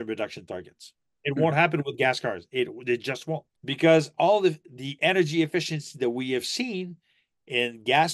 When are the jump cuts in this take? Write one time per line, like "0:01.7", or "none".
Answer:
0:01.0
0:03.5